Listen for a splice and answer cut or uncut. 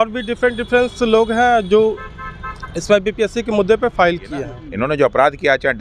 cut